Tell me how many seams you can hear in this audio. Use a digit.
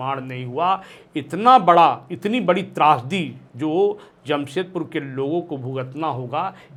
0